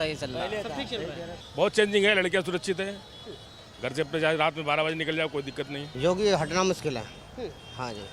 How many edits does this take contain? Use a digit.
2